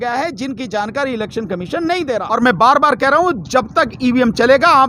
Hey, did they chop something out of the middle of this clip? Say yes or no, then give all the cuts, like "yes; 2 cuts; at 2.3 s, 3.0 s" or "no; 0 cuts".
yes; 1 cut; at 2.3 s